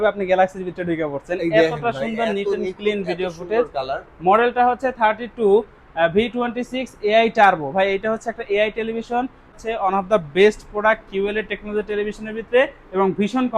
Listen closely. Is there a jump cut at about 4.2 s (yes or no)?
no